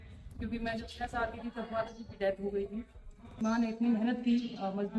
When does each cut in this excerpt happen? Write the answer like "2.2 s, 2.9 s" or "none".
3.4 s